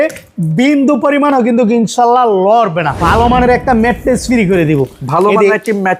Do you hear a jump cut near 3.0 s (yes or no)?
yes